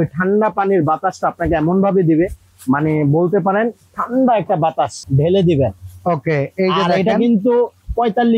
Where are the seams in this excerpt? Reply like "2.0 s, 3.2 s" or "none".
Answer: 5.0 s